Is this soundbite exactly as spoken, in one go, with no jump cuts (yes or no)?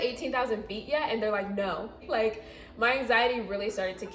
no